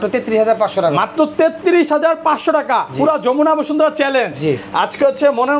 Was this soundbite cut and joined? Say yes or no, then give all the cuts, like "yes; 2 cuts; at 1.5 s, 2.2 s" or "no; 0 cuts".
no; 0 cuts